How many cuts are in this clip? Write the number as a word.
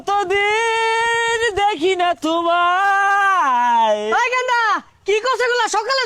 zero